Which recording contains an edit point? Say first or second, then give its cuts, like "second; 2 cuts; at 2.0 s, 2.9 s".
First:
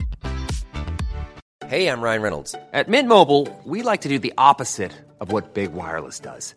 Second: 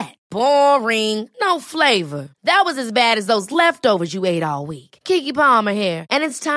first; 1 cut; at 1.4 s